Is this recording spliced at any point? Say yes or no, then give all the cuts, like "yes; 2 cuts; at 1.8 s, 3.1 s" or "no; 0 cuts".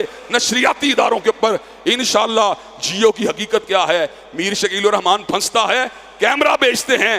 no; 0 cuts